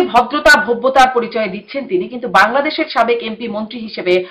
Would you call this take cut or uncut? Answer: uncut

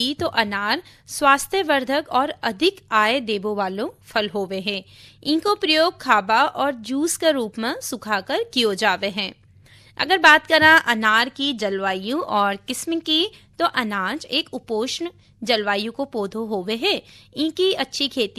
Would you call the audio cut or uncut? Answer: uncut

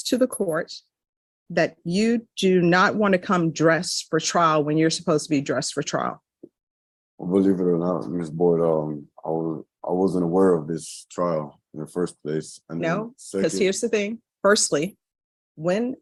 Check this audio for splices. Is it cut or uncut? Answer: uncut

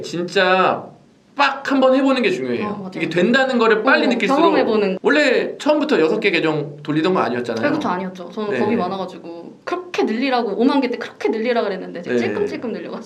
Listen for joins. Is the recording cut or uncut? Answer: uncut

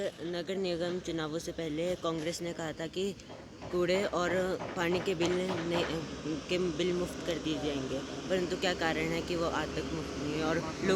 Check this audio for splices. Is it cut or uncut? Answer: uncut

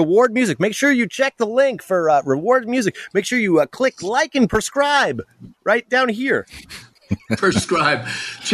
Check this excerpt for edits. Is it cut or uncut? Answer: cut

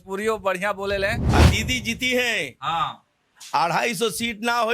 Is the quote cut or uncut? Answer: cut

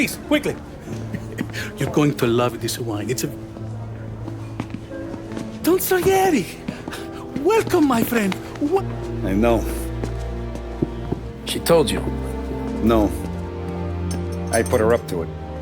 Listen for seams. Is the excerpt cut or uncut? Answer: cut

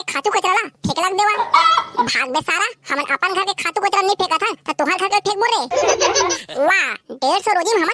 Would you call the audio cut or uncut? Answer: cut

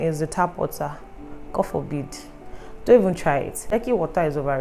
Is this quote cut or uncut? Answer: cut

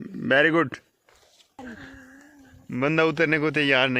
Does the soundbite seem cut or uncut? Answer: cut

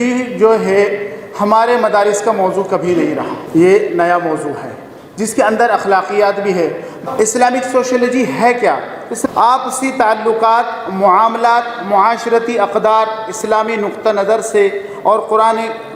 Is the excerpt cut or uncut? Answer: cut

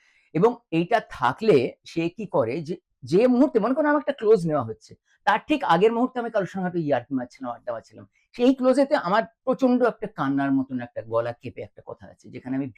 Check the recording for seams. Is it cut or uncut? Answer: uncut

